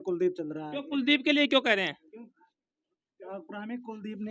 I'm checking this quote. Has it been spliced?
no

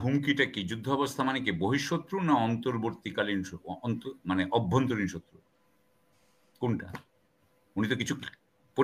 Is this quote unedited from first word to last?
yes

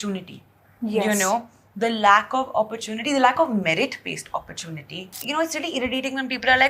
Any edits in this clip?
yes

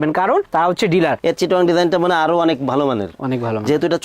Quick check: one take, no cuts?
no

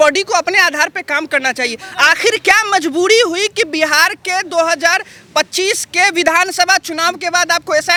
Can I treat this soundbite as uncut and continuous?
yes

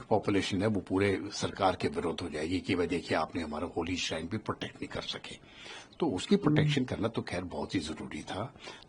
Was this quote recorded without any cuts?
yes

